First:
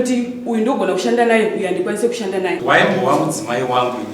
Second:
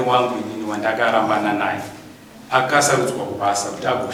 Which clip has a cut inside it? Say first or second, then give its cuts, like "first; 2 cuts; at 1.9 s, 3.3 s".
first; 1 cut; at 2.6 s